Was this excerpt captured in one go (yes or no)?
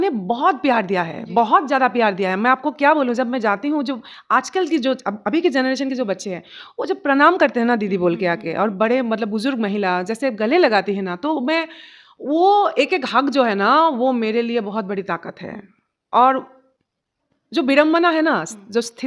yes